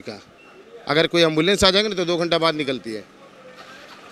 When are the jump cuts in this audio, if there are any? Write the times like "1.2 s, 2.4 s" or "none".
none